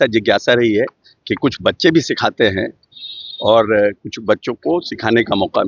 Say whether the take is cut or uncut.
uncut